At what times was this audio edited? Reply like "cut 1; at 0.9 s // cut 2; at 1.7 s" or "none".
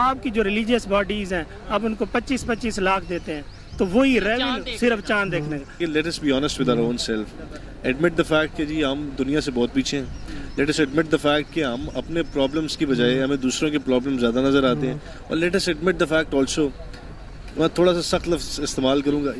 cut 1; at 5.7 s